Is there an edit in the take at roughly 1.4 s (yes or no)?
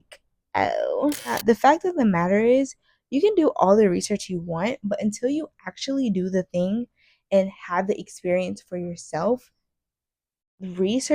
yes